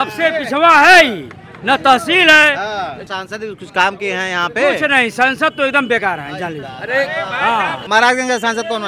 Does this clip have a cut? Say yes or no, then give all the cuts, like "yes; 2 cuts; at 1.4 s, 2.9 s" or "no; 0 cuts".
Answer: yes; 2 cuts; at 3.1 s, 7.8 s